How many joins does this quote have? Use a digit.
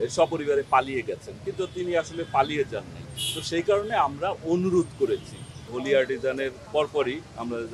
1